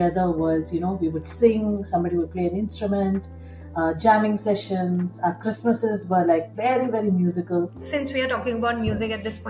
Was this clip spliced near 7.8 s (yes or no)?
yes